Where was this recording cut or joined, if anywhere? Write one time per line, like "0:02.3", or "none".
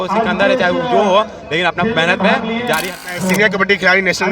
0:03.0